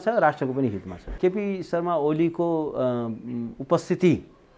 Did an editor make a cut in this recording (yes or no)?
yes